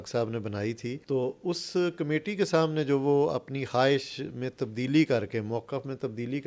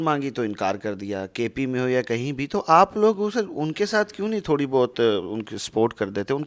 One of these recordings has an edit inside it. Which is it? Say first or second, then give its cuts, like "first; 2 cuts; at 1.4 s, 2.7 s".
first; 1 cut; at 0.9 s